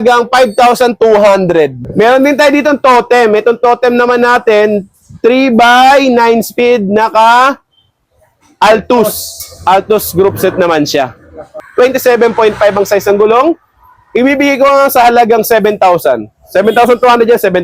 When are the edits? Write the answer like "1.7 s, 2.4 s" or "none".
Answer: 1.8 s, 11.5 s